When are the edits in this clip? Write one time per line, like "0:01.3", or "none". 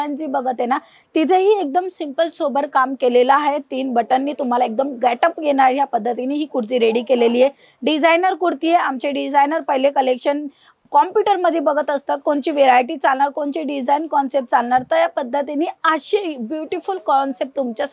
none